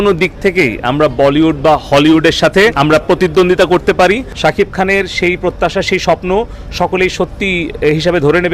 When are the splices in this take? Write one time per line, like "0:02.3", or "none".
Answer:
0:02.8
0:04.3